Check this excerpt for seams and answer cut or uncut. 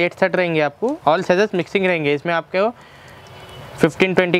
uncut